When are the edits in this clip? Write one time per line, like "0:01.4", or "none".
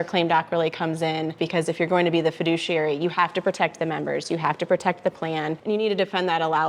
0:01.4
0:05.6